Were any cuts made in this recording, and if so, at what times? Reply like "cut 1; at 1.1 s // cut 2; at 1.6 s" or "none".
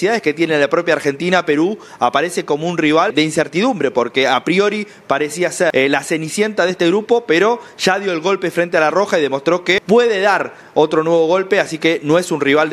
cut 1; at 3.1 s // cut 2; at 5.7 s // cut 3; at 9.8 s